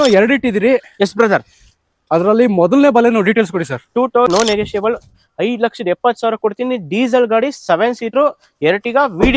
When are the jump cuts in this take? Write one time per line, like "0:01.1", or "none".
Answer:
0:04.3